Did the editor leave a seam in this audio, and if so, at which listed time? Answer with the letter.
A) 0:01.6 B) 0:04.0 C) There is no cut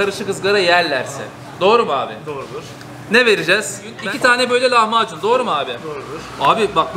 B